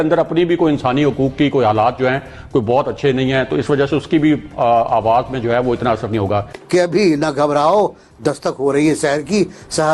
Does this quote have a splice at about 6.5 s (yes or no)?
yes